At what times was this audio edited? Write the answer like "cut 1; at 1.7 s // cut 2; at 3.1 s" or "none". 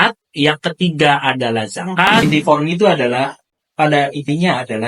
cut 1; at 2.2 s